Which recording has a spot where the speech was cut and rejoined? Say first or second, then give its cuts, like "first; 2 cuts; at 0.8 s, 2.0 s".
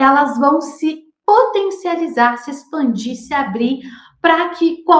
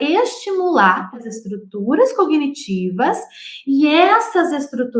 second; 1 cut; at 1.3 s